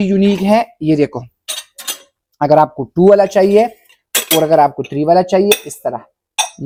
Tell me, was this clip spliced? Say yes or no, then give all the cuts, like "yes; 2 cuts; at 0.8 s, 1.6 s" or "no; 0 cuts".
no; 0 cuts